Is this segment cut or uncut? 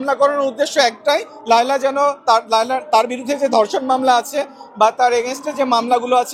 uncut